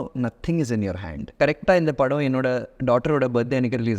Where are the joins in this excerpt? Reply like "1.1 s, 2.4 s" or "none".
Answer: 1.2 s